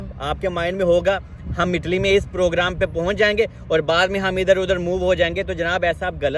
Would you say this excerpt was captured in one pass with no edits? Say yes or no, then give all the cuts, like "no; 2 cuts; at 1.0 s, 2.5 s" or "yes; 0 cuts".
yes; 0 cuts